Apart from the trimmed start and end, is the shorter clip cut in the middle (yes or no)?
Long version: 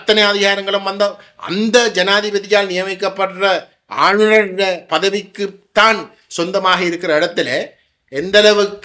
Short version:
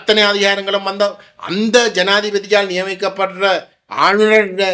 no